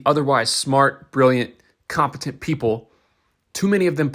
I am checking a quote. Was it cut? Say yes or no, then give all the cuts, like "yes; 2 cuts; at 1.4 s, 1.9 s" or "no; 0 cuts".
no; 0 cuts